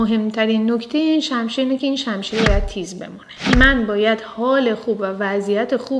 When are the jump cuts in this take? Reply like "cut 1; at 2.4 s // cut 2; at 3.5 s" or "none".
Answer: cut 1; at 3.5 s